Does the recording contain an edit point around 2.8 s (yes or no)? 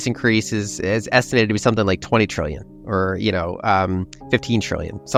no